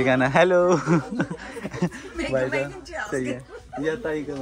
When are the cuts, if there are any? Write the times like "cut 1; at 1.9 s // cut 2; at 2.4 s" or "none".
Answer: none